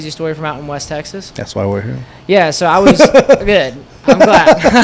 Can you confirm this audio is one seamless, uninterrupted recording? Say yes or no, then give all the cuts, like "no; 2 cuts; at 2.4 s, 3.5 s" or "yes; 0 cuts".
yes; 0 cuts